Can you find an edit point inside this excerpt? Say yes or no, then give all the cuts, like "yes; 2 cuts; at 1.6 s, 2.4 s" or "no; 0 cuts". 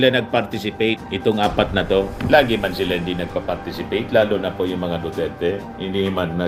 no; 0 cuts